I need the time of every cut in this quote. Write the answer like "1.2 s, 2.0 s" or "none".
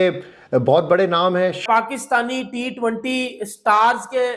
1.6 s